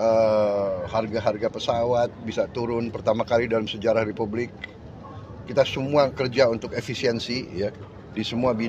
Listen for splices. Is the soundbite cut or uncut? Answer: uncut